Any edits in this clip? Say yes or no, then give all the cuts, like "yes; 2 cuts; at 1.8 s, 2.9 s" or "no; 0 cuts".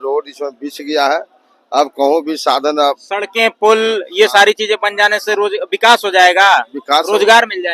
no; 0 cuts